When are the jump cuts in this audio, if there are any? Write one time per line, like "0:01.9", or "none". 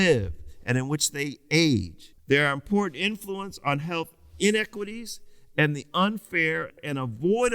0:02.1